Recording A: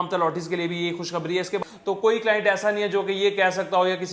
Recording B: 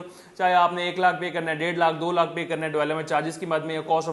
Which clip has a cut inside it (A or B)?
A